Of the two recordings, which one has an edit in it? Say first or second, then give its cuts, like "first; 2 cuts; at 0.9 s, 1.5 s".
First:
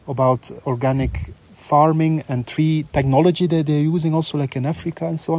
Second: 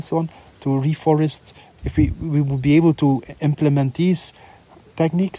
second; 1 cut; at 1.7 s